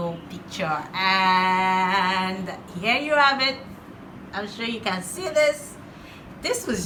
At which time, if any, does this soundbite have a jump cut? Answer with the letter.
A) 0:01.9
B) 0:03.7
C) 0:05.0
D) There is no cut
D